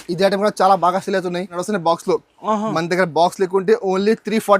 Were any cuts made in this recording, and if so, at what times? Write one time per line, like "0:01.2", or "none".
0:01.6